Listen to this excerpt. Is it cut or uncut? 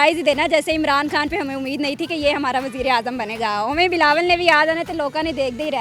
uncut